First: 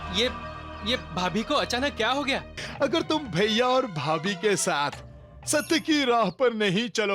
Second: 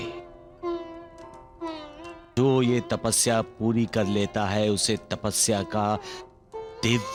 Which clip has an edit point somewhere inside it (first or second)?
first